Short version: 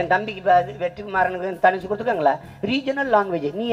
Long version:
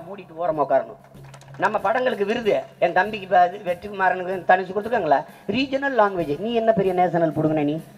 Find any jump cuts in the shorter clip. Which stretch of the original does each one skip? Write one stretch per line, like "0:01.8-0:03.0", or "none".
none